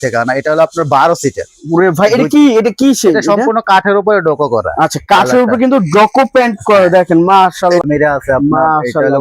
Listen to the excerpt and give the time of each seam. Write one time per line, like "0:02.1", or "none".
0:07.8

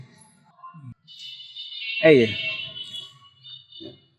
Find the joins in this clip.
0:01.0

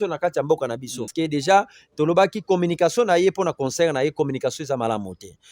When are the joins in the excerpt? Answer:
0:01.1

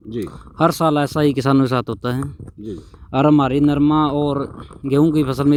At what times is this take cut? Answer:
none

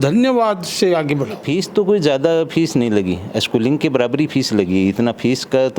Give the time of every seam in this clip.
0:01.4

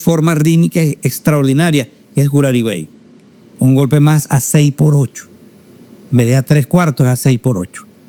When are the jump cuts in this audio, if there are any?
none

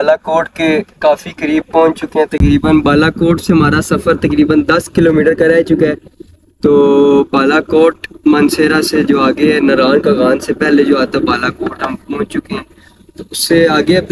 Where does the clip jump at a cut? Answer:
none

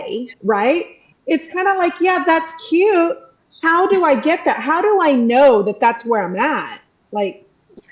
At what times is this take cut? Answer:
none

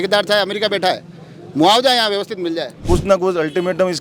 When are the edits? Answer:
0:02.8

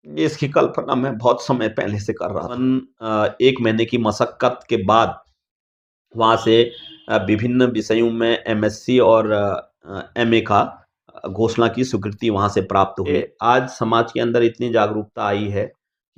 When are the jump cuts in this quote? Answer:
0:02.6
0:13.1

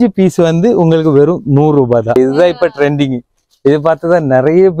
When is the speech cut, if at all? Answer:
0:02.2

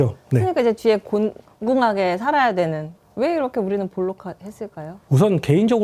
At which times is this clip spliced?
0:03.0
0:04.9

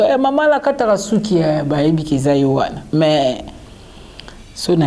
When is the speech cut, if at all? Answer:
none

